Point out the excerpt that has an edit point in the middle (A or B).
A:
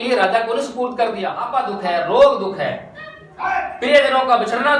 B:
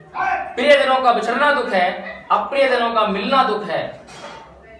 A